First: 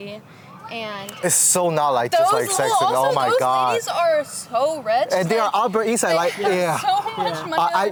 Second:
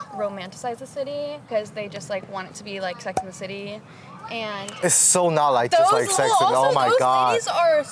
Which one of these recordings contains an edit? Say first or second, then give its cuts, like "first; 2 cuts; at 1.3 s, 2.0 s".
second; 1 cut; at 1.4 s